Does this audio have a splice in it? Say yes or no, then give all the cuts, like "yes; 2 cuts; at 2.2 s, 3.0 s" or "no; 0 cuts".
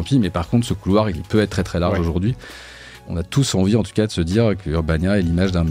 yes; 3 cuts; at 1.2 s, 2.9 s, 4.6 s